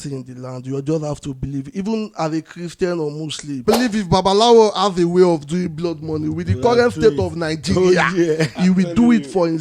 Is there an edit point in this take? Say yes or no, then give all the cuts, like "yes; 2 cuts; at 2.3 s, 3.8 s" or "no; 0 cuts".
yes; 1 cut; at 3.6 s